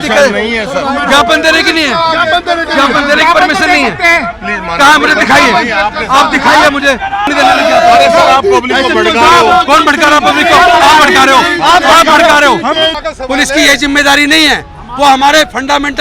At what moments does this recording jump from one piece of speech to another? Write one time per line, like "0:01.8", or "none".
0:07.3
0:13.0